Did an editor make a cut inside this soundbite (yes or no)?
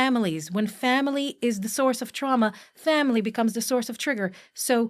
no